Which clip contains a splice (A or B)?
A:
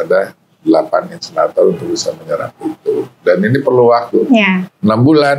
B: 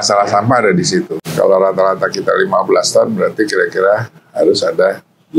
B